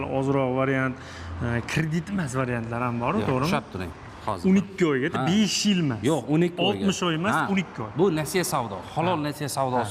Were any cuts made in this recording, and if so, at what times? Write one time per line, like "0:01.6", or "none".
0:04.3